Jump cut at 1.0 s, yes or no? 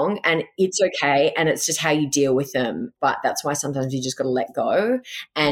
no